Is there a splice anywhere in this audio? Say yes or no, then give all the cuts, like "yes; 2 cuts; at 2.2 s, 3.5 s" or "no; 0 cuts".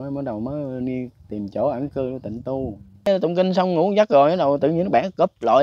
yes; 1 cut; at 3.1 s